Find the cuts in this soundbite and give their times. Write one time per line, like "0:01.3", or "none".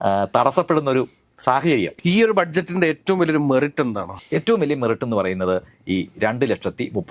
0:01.9